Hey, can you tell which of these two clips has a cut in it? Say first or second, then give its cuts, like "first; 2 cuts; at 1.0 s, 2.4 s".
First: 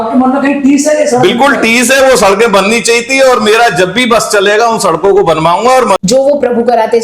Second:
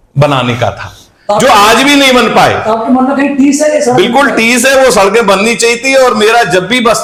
first; 1 cut; at 6.0 s